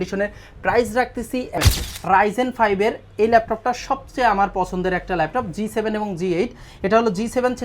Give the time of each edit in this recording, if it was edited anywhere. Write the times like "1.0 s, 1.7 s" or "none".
1.6 s